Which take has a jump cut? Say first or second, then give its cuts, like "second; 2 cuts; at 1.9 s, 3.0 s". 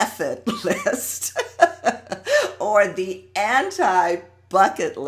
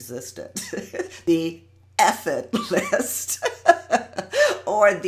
second; 1 cut; at 1.1 s